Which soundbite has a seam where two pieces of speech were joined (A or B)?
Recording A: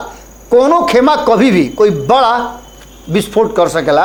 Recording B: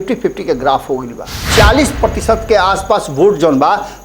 B